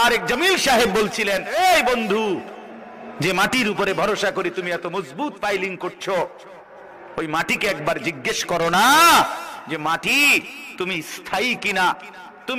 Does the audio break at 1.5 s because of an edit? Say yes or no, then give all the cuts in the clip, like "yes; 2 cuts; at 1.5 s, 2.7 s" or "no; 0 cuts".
yes; 1 cut; at 1.5 s